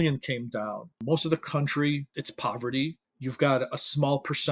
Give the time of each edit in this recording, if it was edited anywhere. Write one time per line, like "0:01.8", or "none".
0:01.0
0:02.2
0:03.1